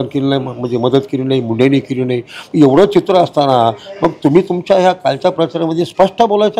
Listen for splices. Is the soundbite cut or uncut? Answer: uncut